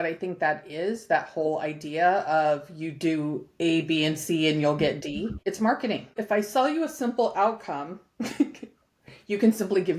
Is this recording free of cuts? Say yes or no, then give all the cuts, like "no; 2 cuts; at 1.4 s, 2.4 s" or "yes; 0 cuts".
no; 2 cuts; at 5.4 s, 6.2 s